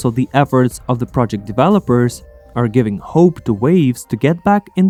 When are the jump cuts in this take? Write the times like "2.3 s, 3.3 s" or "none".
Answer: none